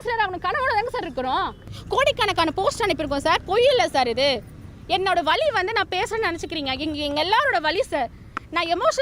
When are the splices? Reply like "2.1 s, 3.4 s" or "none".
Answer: 1.7 s